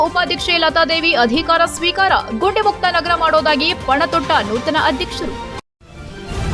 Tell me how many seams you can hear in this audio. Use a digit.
1